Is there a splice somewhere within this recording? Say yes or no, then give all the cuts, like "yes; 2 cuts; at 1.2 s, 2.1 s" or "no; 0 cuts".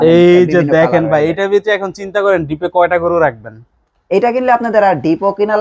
no; 0 cuts